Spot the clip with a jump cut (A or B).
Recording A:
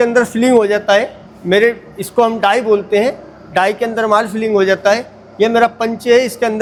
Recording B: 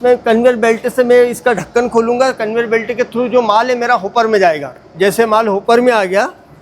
B